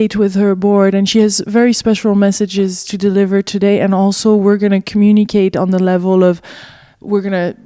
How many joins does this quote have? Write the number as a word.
one